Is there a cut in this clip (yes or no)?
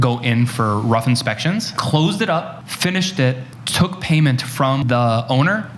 yes